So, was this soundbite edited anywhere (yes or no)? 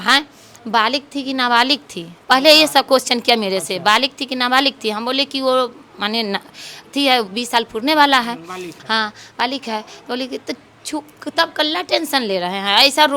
no